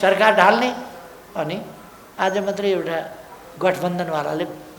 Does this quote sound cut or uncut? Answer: uncut